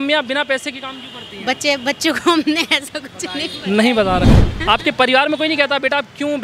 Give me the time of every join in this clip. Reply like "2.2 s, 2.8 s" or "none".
4.3 s